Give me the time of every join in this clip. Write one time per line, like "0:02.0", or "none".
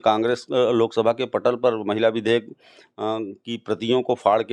none